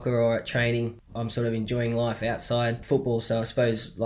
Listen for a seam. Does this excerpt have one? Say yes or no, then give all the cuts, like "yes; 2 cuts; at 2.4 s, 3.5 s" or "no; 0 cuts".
yes; 2 cuts; at 1.0 s, 2.8 s